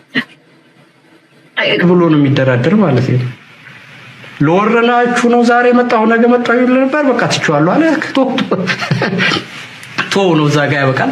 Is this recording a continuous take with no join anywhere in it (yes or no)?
no